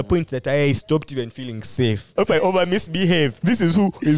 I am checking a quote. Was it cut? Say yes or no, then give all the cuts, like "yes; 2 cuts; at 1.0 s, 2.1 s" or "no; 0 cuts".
yes; 2 cuts; at 2.1 s, 3.4 s